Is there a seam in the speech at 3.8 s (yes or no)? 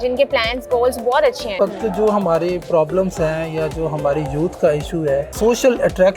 no